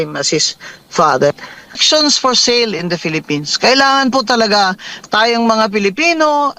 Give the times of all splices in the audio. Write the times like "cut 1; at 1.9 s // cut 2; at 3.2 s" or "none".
cut 1; at 1.8 s